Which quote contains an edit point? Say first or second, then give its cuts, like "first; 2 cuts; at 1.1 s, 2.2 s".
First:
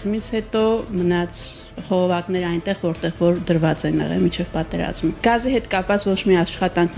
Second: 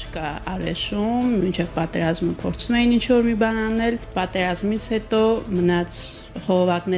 second; 1 cut; at 1.4 s